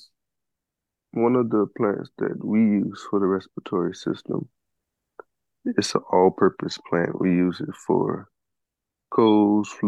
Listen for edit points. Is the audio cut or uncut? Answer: uncut